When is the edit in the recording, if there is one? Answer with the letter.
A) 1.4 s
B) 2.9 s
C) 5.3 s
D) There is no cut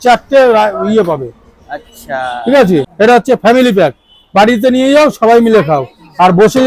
B